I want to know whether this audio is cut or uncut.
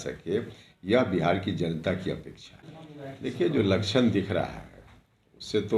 uncut